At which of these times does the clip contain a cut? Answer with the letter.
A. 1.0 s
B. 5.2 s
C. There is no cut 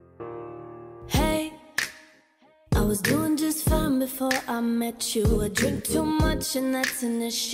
A